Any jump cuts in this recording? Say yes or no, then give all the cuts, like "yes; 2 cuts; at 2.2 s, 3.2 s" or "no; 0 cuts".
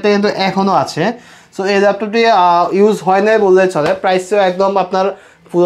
no; 0 cuts